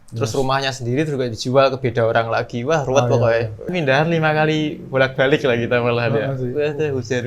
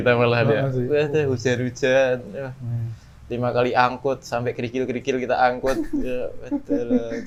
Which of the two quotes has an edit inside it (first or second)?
first